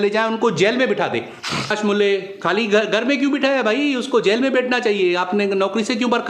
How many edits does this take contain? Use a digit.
1